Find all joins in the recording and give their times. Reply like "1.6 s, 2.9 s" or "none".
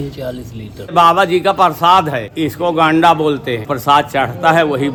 none